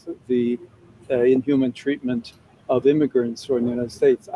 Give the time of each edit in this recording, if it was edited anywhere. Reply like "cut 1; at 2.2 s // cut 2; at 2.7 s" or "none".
none